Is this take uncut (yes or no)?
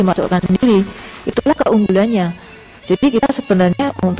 yes